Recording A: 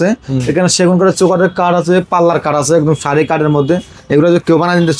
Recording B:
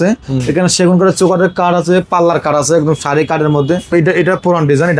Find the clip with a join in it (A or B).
B